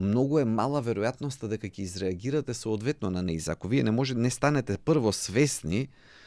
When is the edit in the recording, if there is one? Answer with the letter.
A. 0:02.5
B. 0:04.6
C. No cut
C